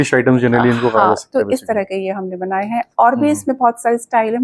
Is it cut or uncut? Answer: uncut